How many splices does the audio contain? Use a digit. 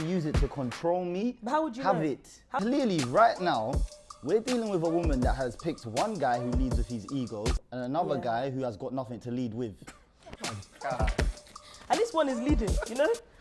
1